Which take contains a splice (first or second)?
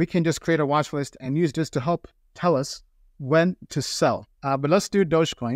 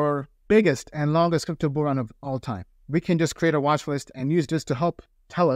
first